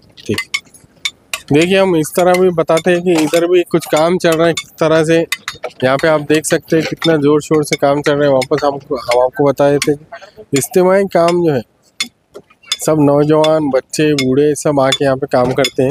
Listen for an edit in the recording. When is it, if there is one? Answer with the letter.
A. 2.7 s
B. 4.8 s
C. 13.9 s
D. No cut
D